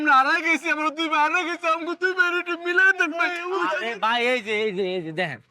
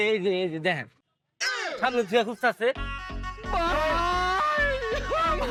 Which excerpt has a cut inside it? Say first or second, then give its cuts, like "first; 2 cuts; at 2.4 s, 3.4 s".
first; 1 cut; at 3.3 s